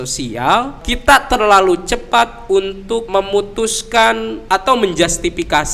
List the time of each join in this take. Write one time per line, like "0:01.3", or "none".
0:00.9
0:03.1
0:04.4